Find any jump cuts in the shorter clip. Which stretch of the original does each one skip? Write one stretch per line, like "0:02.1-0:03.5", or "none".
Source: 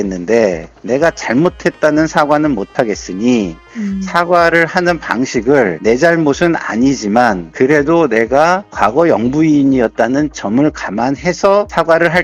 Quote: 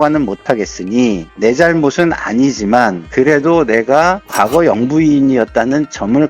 0:03.6-0:05.8